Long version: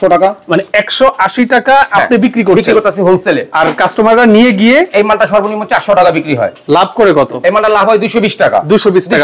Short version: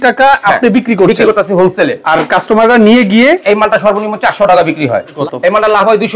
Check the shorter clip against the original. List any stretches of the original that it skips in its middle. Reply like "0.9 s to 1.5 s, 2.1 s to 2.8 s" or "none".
6.7 s to 7.2 s